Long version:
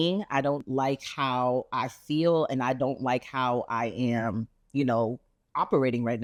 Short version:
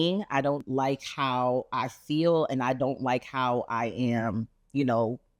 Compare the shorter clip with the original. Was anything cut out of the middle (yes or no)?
no